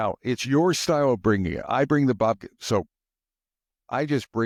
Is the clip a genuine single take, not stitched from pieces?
yes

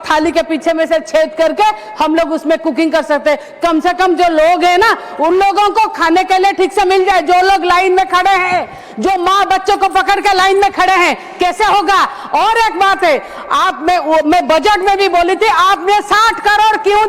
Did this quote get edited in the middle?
no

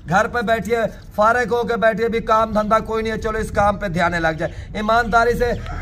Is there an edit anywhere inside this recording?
no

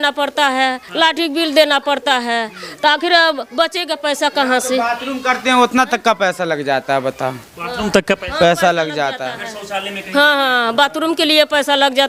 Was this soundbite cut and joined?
no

